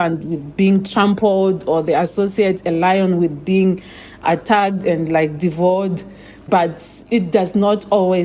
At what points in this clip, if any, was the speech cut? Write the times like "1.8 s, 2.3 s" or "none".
6.4 s